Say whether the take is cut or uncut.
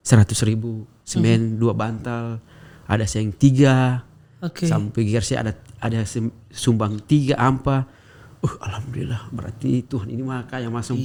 uncut